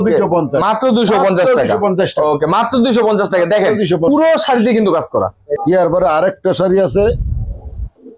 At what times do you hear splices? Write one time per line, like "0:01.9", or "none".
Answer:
0:05.5